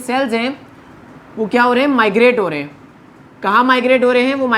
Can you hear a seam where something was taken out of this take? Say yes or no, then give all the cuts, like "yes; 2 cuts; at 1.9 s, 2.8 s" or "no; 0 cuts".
no; 0 cuts